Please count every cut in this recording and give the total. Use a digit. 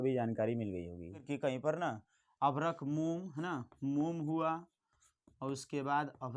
1